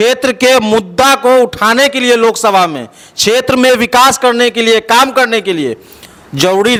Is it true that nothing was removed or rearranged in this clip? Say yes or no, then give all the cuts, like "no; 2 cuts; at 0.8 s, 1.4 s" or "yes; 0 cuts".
yes; 0 cuts